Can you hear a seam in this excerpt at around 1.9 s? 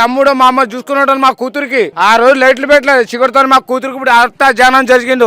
yes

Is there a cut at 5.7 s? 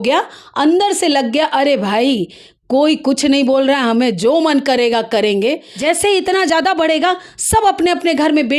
yes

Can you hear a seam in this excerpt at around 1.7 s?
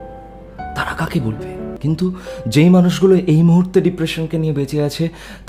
yes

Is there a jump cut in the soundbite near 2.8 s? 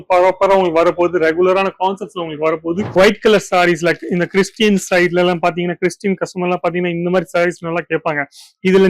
yes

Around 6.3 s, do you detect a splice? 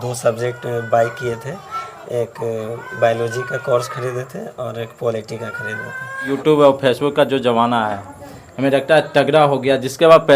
yes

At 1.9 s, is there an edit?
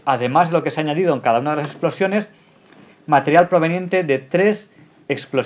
no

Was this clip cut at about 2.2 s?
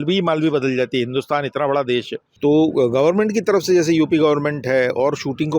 yes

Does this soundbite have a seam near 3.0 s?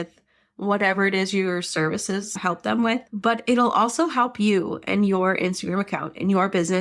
no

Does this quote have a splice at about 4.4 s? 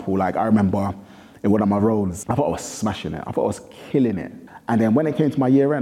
yes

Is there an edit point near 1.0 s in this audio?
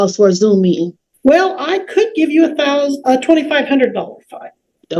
yes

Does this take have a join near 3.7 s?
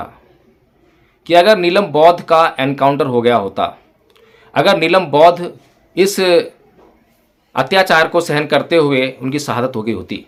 no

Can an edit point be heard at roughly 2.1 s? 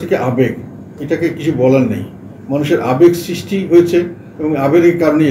no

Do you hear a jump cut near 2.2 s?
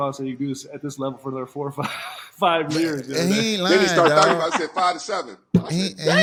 no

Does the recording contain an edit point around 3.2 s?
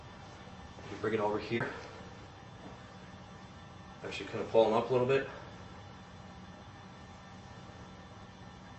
no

